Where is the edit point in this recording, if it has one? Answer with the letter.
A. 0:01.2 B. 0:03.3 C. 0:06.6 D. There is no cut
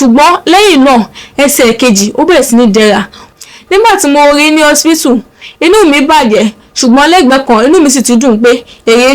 B